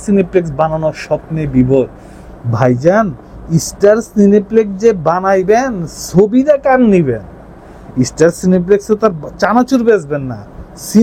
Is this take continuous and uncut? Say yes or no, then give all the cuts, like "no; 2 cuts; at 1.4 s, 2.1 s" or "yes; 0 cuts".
yes; 0 cuts